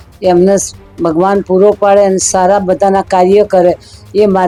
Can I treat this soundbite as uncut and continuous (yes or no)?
yes